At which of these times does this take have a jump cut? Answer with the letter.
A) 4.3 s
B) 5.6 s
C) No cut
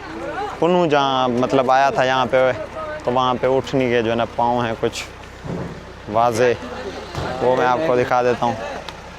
C